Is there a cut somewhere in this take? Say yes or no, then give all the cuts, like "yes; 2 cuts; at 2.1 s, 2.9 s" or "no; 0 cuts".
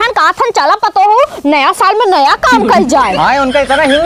no; 0 cuts